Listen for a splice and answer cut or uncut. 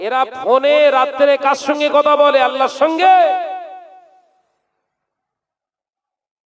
uncut